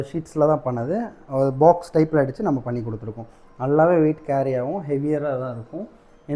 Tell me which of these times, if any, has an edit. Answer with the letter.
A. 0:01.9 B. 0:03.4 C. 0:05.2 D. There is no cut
D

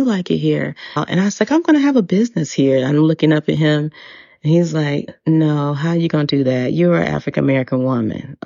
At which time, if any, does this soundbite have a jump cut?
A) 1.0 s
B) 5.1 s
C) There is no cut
A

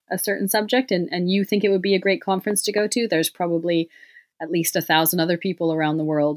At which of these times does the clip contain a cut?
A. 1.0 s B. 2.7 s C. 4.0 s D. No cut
D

